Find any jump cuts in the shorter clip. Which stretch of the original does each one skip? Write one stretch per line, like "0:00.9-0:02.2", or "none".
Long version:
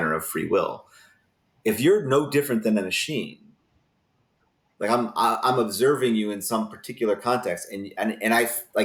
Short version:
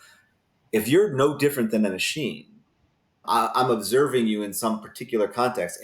0:04.2-0:05.1